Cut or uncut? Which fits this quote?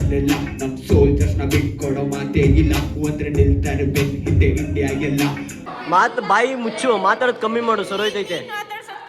cut